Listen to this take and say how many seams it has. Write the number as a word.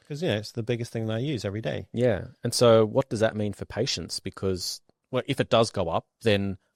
zero